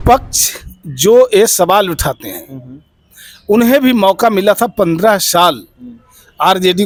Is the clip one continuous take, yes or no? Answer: yes